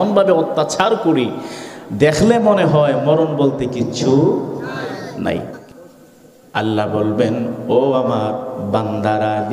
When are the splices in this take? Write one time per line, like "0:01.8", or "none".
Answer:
0:05.6